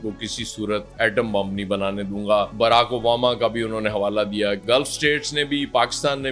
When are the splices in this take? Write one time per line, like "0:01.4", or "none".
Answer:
0:04.6